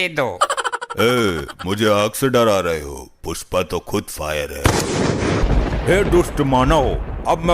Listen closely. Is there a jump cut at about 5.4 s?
yes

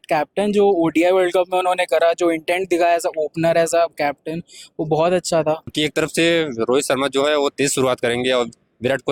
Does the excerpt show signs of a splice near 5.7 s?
yes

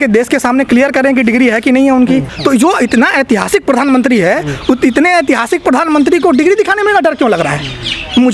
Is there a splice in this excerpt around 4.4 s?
no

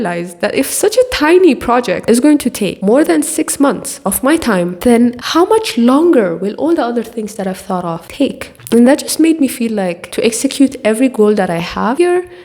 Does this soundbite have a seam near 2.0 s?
yes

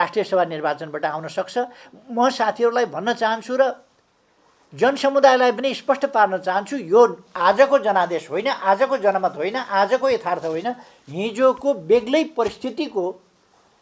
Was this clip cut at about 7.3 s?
no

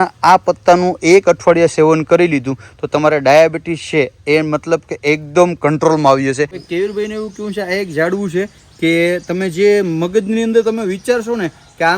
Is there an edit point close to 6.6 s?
yes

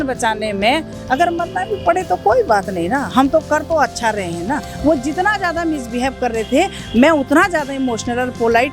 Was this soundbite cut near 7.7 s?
no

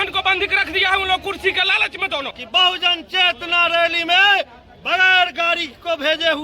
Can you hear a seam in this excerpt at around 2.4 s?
yes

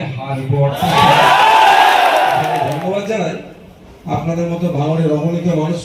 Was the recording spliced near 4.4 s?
no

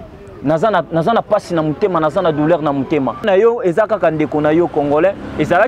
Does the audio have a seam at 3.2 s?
yes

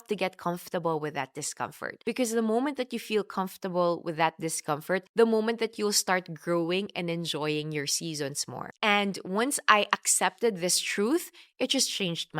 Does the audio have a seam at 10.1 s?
no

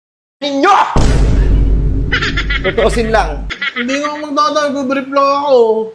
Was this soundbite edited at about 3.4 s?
yes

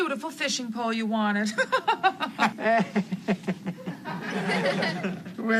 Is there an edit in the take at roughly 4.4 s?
no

